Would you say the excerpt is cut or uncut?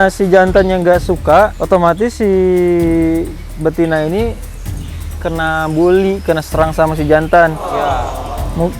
uncut